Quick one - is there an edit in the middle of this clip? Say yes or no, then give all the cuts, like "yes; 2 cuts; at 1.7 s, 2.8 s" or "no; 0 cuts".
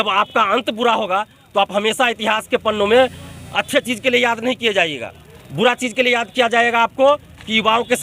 no; 0 cuts